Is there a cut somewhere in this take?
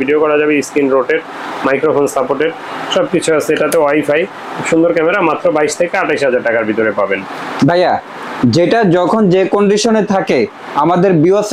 no; 0 cuts

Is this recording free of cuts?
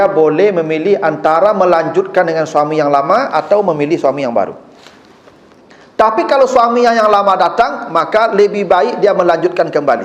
yes; 0 cuts

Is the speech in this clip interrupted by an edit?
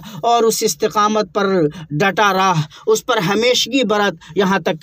no; 0 cuts

